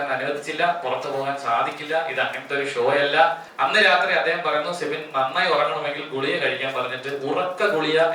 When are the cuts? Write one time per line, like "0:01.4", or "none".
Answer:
0:03.5